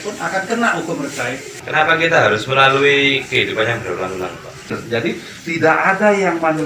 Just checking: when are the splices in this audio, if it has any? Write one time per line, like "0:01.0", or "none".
0:01.5
0:04.8